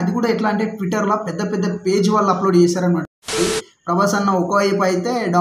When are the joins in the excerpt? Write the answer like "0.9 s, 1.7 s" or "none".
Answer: 3.3 s